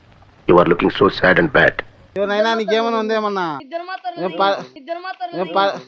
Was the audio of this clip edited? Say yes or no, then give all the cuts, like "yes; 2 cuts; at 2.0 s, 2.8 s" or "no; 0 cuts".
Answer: yes; 1 cut; at 3.6 s